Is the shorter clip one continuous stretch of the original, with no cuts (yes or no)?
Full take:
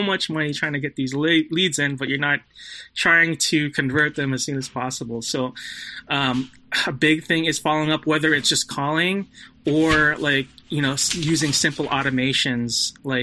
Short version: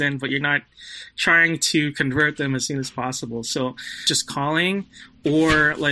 no